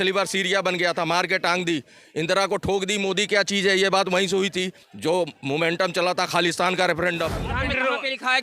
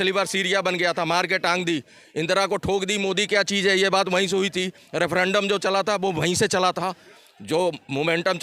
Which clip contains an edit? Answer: first; 2 cuts; at 4.8 s, 7.5 s

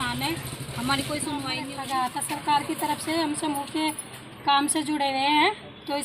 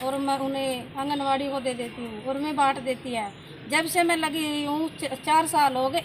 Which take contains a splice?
first; 1 cut; at 1.7 s

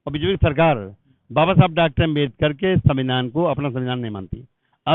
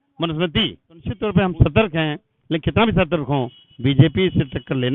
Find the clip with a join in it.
second; 1 cut; at 1.2 s

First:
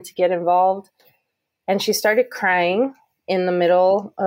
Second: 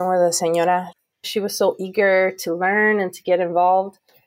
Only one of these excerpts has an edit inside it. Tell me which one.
second; 1 cut; at 1.1 s

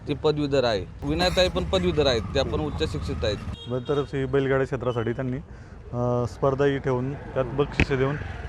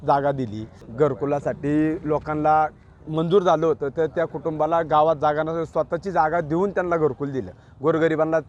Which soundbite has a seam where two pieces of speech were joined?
first; 2 cuts; at 1.0 s, 3.5 s

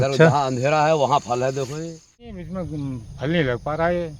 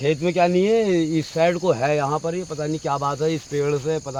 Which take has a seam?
first; 1 cut; at 2.4 s

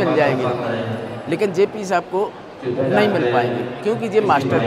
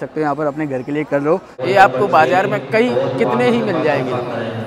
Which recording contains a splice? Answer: second; 1 cut; at 1.5 s

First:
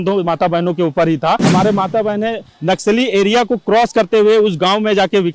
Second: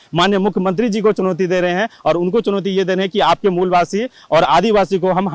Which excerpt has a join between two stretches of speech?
first; 1 cut; at 1.4 s

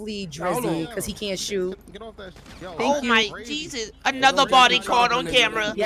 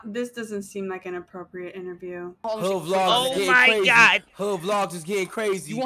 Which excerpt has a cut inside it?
second; 1 cut; at 2.4 s

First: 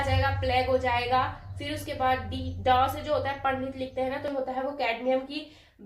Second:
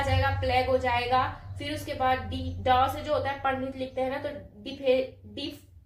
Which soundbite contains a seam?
first; 1 cut; at 4.3 s

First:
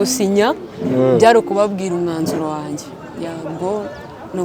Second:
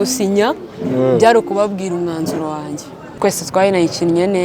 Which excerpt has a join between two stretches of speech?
second; 1 cut; at 3.1 s

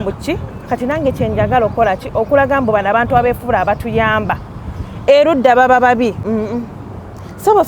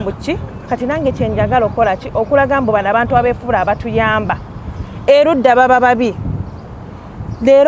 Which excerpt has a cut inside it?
first; 1 cut; at 6.2 s

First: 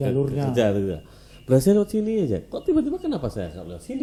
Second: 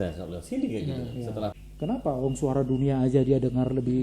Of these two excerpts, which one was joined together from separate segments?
second; 1 cut; at 1.6 s

